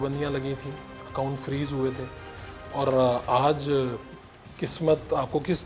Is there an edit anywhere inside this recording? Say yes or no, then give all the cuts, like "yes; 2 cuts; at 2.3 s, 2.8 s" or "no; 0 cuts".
no; 0 cuts